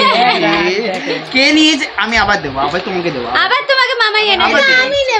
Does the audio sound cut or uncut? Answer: uncut